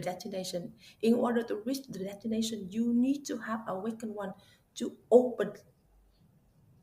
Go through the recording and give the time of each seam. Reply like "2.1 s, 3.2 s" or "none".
none